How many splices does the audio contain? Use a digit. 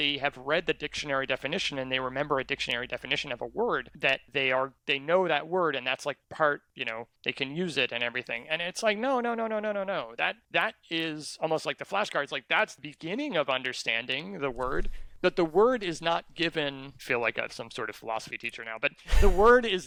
0